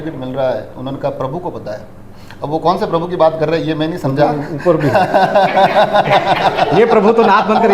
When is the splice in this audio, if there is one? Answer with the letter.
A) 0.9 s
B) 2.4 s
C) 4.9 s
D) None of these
D